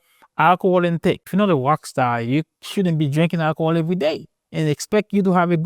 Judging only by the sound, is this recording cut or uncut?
cut